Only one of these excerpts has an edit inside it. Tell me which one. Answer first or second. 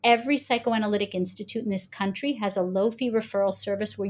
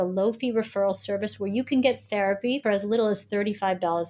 second